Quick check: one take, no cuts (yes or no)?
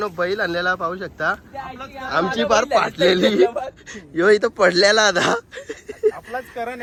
yes